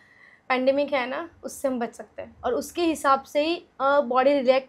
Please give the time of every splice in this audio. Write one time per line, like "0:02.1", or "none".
0:02.2

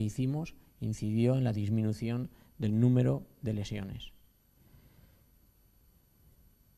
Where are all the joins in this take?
none

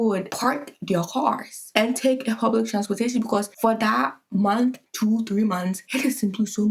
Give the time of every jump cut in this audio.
none

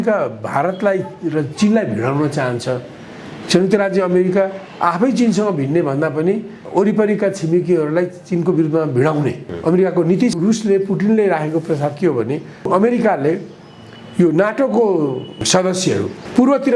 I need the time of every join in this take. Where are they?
0:06.6
0:09.5
0:10.3
0:12.7
0:15.7

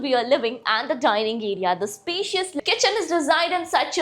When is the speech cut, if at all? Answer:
0:02.6

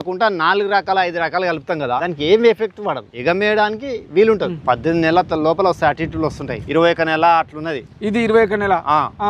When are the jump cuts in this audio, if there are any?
0:02.0
0:03.1
0:04.6
0:06.5

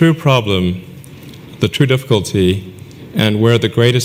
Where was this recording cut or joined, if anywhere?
none

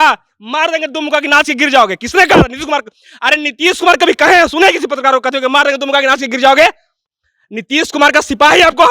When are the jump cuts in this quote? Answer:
none

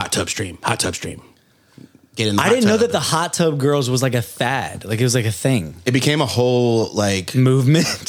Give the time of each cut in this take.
none

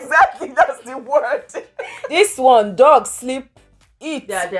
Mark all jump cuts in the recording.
0:02.1

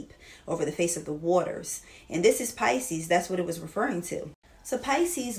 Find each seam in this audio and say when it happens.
none

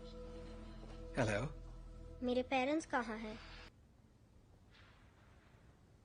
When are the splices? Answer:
0:03.7

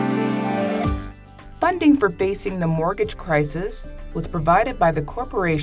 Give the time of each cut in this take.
0:01.1

